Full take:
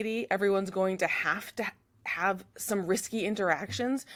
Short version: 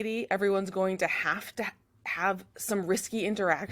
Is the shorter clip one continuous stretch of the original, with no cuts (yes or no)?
yes